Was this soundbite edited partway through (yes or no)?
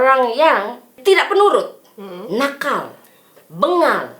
yes